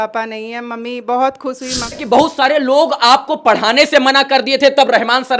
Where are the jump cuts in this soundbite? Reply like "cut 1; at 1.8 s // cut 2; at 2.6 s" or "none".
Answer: cut 1; at 2.0 s